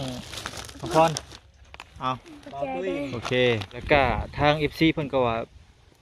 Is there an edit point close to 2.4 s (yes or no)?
no